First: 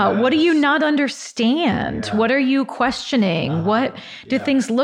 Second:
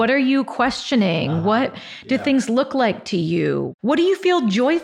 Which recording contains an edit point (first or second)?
second